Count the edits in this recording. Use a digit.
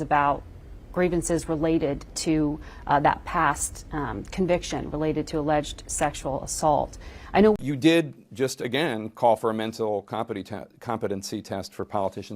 1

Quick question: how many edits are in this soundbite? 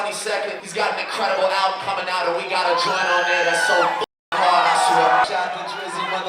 1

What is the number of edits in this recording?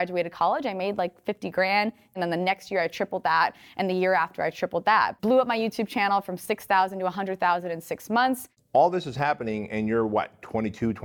3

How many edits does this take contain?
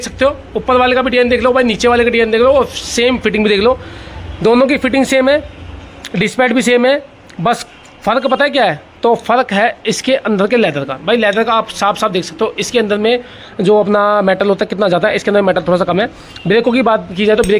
0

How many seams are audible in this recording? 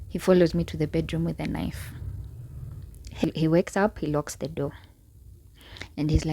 1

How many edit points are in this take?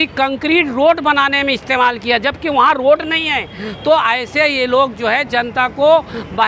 0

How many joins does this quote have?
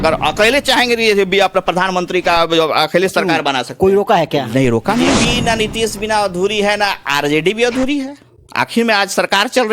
1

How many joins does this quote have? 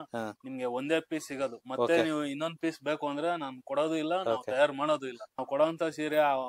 1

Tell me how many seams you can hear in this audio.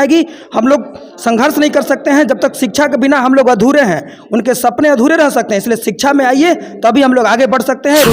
0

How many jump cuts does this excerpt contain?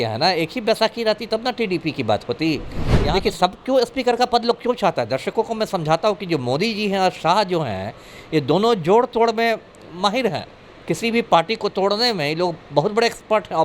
1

